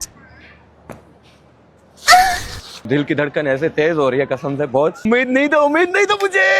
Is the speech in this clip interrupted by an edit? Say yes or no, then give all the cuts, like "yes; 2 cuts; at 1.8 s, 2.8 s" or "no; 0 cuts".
yes; 2 cuts; at 2.9 s, 5.0 s